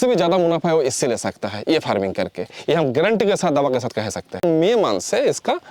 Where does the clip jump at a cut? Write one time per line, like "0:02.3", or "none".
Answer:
0:04.4

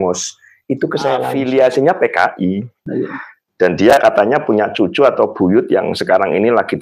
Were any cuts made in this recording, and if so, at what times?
0:01.3

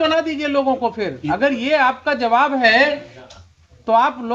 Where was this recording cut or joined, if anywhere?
none

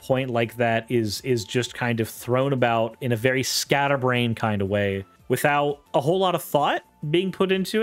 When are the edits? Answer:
0:05.1
0:05.8
0:06.9

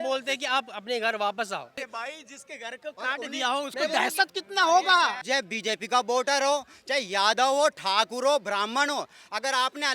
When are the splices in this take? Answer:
0:01.8
0:05.2

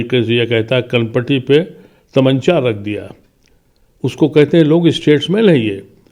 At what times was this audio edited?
none

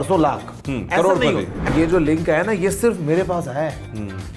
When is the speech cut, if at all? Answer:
0:01.7

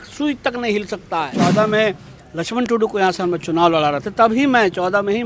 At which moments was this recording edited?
0:01.3

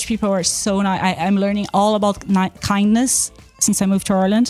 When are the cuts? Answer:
none

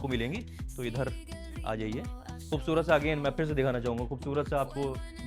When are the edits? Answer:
0:02.3

